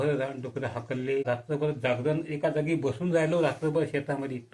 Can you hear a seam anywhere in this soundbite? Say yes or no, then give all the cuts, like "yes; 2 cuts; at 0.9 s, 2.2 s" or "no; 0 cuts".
yes; 1 cut; at 1.3 s